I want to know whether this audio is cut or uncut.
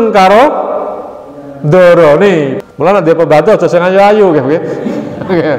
cut